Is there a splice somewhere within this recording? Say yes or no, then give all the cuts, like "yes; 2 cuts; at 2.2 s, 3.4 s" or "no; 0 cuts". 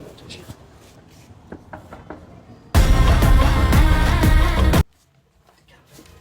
yes; 2 cuts; at 1.0 s, 4.8 s